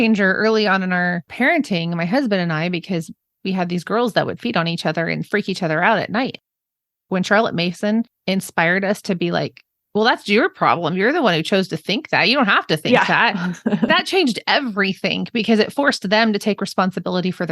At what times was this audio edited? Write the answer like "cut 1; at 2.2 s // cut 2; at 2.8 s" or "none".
cut 1; at 1.3 s